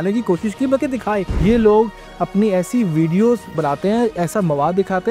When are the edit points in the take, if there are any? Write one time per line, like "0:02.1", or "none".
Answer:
0:01.3
0:03.5